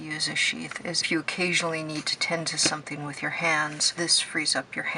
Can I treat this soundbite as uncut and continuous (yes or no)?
no